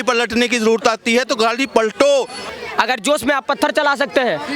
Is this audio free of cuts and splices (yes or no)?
no